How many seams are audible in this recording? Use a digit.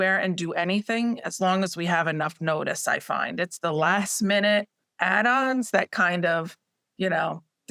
0